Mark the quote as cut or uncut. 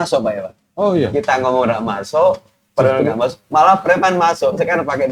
uncut